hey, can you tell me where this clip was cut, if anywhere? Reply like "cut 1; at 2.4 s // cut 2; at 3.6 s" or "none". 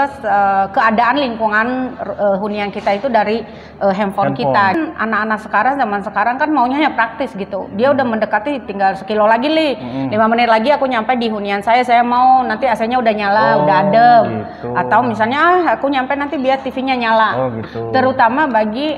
cut 1; at 4.8 s